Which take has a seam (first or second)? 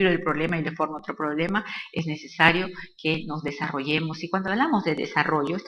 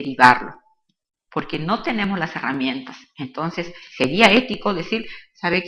first